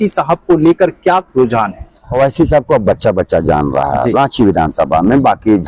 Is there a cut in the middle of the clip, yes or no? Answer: yes